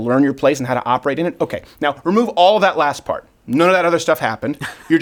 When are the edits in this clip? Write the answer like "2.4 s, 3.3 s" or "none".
none